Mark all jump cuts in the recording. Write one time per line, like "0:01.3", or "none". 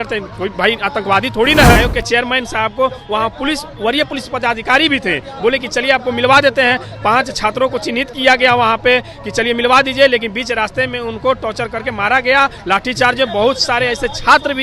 0:01.8